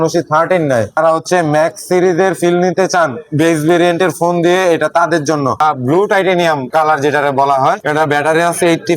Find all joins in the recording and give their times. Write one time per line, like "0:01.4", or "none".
0:00.9
0:05.6

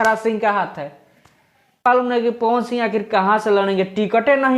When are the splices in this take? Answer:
0:01.8

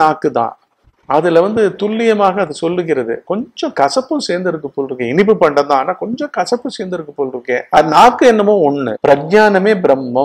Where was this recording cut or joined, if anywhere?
0:07.8
0:08.9

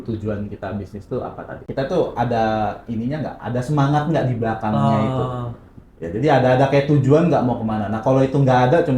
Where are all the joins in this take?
0:01.6

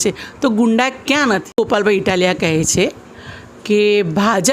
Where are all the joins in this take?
0:01.6

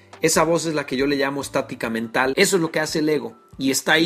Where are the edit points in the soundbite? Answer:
0:02.3

